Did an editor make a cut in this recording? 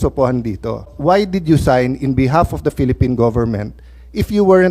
yes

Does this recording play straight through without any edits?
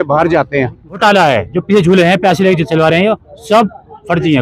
no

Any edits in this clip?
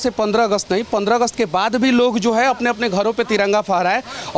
no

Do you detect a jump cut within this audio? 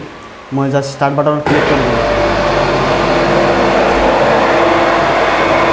no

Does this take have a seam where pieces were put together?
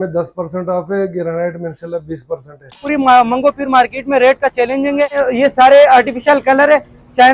yes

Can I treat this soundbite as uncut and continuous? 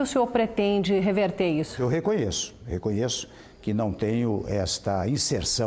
no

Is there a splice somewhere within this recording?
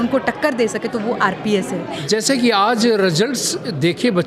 yes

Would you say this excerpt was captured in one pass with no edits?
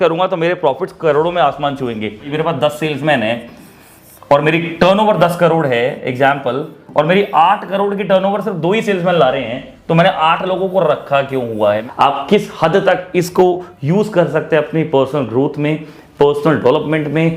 no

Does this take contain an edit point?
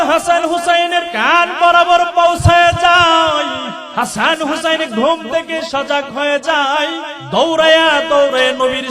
yes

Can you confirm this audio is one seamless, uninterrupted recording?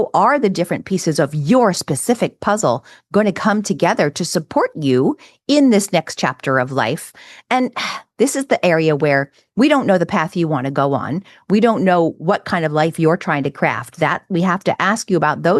yes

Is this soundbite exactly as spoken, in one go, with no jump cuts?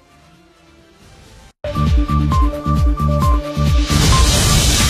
no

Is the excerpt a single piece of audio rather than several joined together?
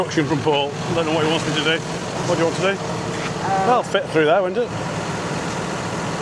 yes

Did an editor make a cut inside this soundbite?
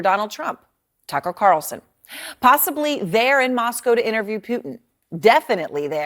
yes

